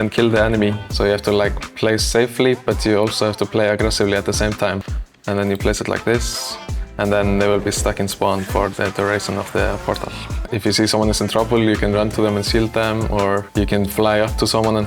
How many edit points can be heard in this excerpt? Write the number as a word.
three